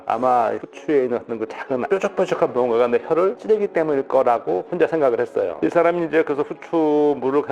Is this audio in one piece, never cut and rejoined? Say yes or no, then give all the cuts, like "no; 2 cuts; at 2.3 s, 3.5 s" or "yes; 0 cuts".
no; 1 cut; at 5.5 s